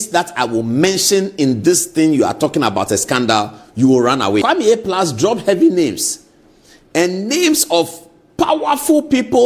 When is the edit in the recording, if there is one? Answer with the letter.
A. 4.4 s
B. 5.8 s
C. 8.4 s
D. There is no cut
A